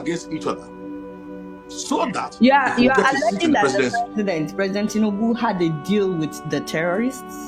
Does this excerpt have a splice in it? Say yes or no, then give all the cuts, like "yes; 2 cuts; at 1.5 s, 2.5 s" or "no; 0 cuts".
no; 0 cuts